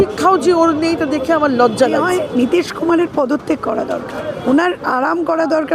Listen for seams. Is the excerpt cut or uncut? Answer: cut